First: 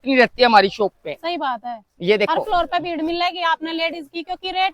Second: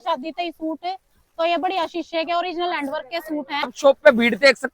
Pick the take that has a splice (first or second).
second